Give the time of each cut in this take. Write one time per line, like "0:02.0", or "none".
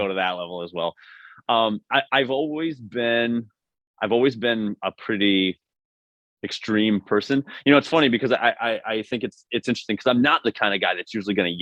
none